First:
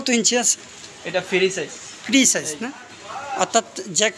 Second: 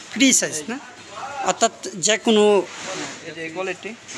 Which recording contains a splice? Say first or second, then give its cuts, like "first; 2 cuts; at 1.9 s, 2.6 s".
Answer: second; 1 cut; at 3.2 s